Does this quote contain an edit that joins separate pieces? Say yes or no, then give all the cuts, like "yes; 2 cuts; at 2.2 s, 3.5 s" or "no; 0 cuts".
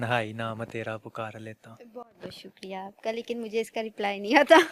no; 0 cuts